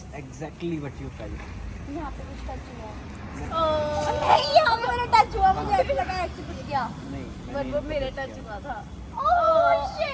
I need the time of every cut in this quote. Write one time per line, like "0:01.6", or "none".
0:03.5